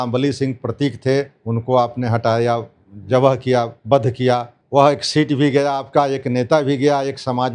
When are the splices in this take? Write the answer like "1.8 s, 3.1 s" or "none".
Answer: 4.5 s